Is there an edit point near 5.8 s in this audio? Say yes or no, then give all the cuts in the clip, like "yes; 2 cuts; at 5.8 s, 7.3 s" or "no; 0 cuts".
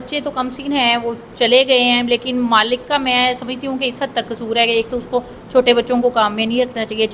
no; 0 cuts